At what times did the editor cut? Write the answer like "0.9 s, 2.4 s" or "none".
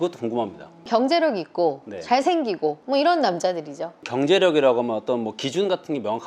0.8 s, 2.8 s, 4.1 s